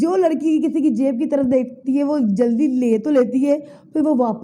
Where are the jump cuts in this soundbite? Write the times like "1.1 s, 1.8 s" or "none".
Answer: none